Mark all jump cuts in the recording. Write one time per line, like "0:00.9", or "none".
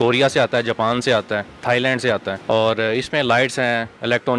0:02.3